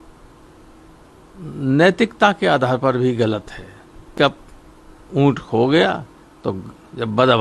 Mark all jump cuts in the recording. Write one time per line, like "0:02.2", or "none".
0:04.1